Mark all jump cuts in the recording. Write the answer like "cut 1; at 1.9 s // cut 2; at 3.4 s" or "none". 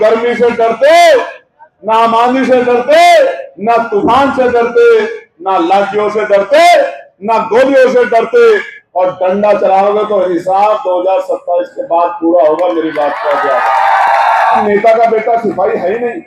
cut 1; at 8.8 s // cut 2; at 14.6 s